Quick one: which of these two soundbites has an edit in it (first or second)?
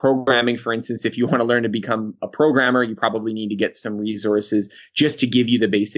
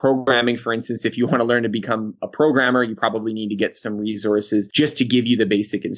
second